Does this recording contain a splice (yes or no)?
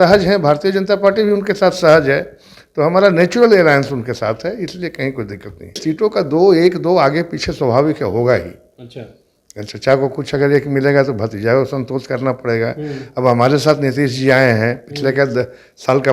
yes